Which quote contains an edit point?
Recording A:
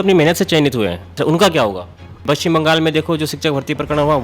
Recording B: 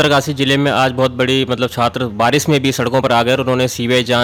A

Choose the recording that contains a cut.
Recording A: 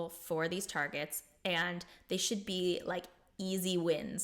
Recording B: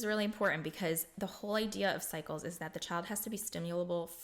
A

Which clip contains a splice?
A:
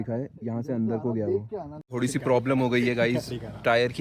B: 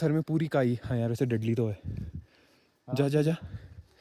A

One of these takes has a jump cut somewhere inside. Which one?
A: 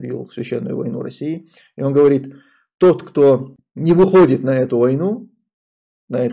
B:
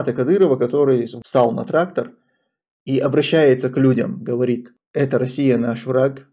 B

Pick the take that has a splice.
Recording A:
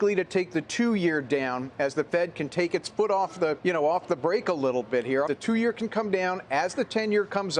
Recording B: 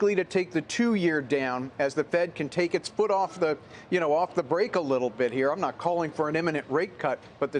A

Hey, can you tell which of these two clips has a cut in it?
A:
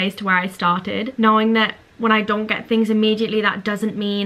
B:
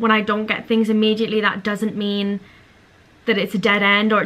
A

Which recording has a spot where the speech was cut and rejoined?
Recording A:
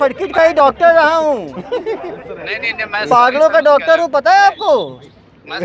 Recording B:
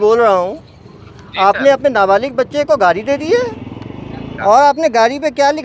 B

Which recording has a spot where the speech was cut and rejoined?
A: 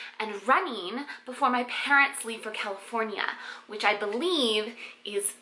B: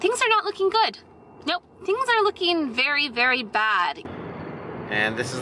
B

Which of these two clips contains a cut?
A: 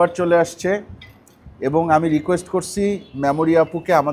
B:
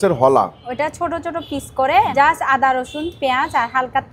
B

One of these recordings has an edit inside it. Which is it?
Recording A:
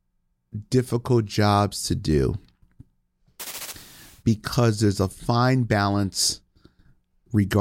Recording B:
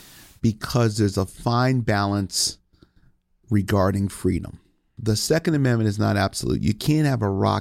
B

